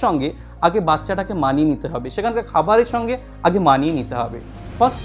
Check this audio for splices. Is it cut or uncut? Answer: uncut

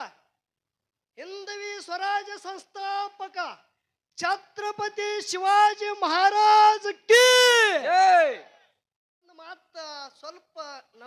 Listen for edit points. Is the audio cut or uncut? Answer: cut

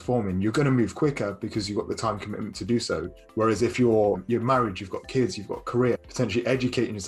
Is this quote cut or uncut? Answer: cut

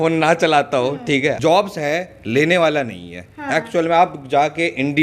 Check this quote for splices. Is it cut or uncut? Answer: cut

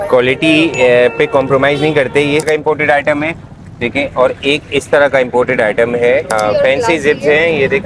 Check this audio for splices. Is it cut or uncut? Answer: cut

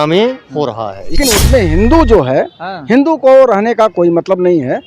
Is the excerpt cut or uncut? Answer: cut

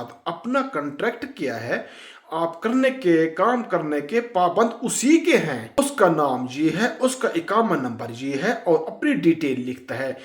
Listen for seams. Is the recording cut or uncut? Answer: cut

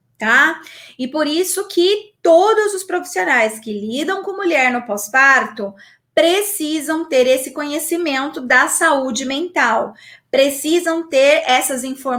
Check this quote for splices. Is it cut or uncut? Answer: uncut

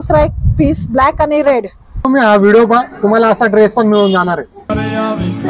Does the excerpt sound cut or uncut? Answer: cut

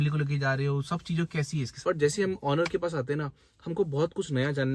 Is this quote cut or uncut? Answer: cut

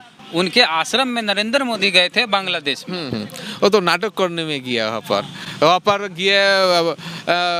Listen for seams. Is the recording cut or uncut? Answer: uncut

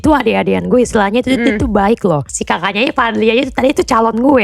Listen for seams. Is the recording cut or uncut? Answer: cut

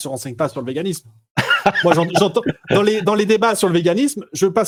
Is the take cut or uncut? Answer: uncut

